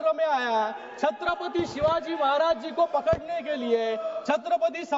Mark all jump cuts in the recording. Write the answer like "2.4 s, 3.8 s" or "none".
none